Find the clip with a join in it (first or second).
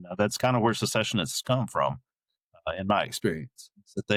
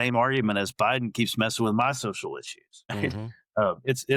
second